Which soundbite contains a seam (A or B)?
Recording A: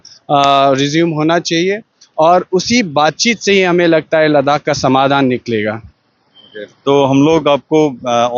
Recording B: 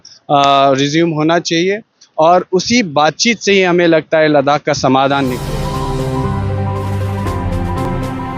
B